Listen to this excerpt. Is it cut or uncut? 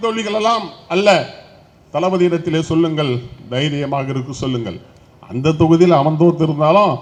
uncut